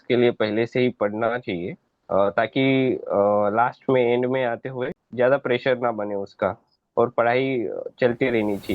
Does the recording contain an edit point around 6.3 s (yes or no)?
no